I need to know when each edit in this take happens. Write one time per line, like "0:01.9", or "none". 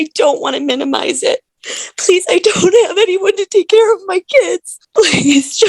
0:01.6
0:04.7